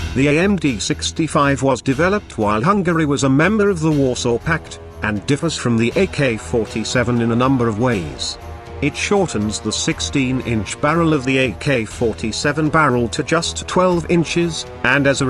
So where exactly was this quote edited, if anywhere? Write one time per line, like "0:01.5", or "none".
0:01.0